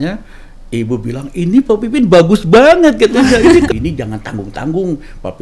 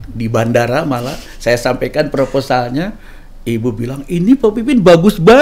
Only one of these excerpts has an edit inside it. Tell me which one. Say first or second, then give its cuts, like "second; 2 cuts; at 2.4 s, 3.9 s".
first; 1 cut; at 3.7 s